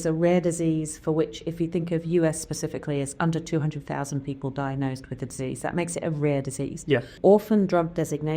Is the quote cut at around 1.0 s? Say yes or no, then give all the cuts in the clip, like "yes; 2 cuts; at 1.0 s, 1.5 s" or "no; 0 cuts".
no; 1 cut; at 7.1 s